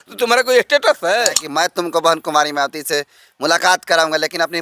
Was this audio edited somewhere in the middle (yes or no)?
yes